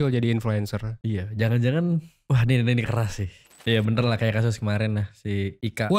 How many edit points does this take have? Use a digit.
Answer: 1